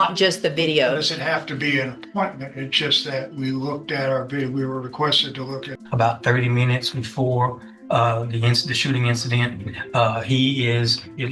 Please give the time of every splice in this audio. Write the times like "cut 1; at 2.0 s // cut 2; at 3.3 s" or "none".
cut 1; at 5.7 s